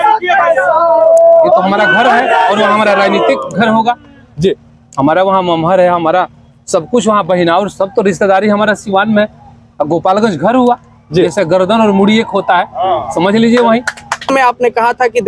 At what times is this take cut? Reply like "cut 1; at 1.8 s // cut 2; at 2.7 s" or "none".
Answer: cut 1; at 14.3 s